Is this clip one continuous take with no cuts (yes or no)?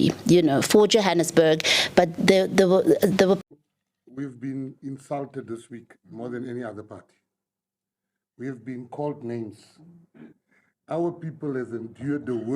no